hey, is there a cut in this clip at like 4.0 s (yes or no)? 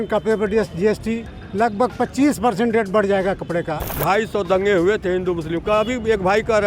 yes